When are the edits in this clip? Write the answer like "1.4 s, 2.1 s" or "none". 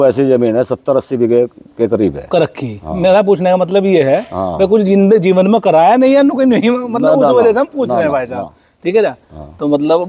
none